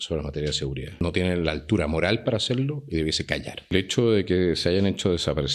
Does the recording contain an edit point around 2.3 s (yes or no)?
no